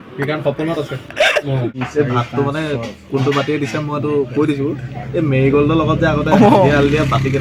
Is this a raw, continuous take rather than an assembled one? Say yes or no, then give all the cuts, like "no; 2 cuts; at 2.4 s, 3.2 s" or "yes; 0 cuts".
no; 1 cut; at 1.7 s